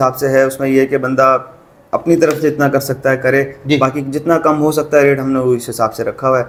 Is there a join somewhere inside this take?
no; 0 cuts

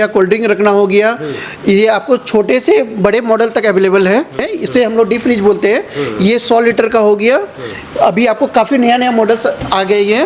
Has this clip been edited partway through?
yes; 1 cut; at 4.4 s

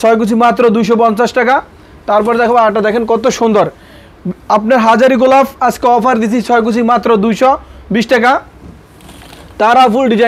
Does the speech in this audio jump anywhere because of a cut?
no; 0 cuts

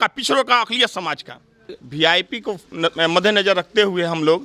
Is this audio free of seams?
no; 1 cut; at 1.8 s

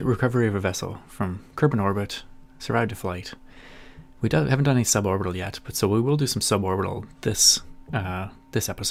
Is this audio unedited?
yes; 0 cuts

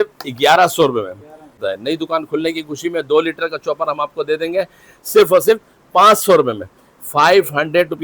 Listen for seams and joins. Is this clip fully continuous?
no; 1 cut; at 1.6 s

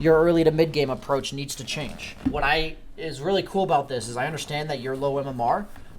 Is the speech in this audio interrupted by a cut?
yes; 1 cut; at 2.0 s

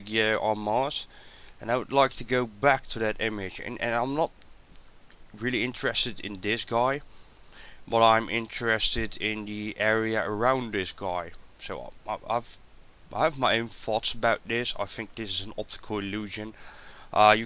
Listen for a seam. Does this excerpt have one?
yes; 1 cut; at 3.6 s

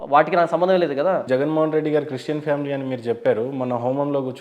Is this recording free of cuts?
no; 1 cut; at 1.2 s

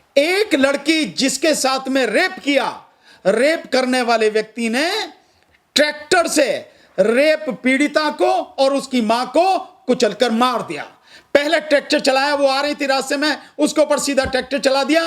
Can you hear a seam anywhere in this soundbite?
no; 0 cuts

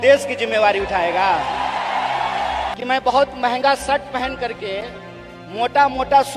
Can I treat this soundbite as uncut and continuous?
no; 1 cut; at 2.7 s

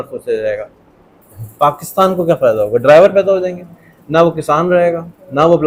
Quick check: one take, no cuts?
yes; 0 cuts

